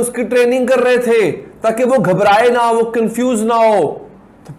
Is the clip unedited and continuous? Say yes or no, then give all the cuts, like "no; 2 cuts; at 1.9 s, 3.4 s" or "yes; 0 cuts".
yes; 0 cuts